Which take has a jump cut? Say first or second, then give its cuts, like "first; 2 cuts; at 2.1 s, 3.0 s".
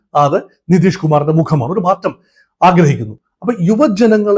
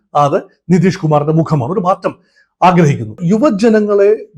second; 1 cut; at 3.2 s